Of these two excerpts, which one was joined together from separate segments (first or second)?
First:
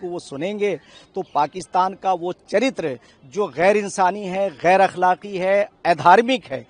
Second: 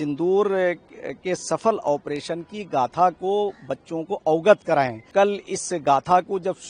second